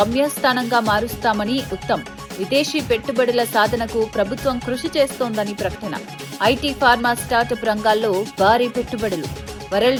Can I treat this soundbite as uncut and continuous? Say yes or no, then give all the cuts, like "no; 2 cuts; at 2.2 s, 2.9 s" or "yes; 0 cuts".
yes; 0 cuts